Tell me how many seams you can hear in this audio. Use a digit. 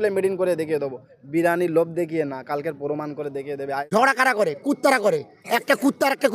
1